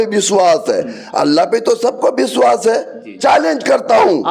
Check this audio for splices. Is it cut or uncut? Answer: cut